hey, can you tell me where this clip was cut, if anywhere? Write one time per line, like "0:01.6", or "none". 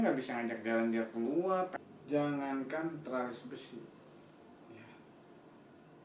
0:01.7